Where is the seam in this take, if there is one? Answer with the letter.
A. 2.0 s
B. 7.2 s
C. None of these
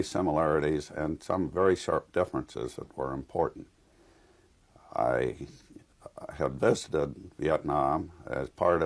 B